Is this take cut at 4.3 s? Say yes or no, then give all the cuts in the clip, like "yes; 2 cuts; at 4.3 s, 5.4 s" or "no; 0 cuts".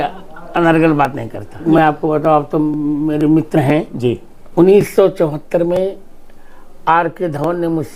yes; 2 cuts; at 1.6 s, 4.3 s